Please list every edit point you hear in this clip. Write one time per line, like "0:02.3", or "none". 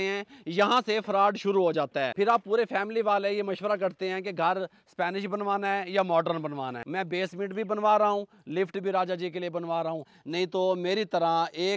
0:02.1
0:06.8
0:10.2